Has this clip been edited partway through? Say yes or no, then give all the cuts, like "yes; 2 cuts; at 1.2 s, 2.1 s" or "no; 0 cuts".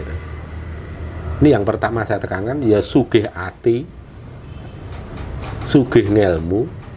no; 0 cuts